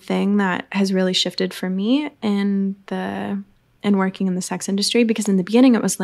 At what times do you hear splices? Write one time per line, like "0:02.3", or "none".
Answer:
none